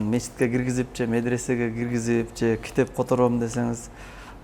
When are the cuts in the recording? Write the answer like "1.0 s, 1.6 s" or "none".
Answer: none